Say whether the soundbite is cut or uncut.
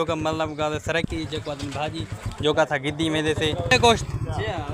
cut